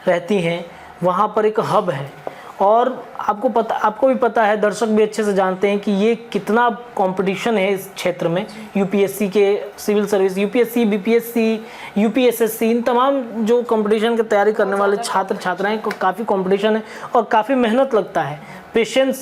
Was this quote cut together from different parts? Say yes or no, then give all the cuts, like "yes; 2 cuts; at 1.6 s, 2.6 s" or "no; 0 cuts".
no; 0 cuts